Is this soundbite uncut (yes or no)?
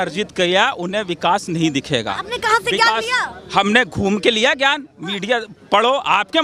yes